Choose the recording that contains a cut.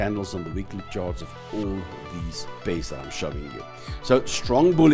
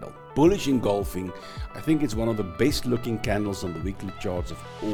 first; 1 cut; at 2.5 s

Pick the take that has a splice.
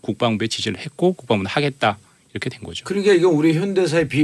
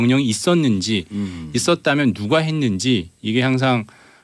second; 1 cut; at 3.2 s

